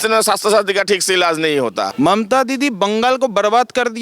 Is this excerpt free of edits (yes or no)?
no